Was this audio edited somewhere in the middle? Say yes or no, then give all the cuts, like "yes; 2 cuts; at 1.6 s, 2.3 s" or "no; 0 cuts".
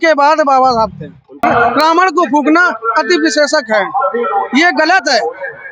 yes; 1 cut; at 1.4 s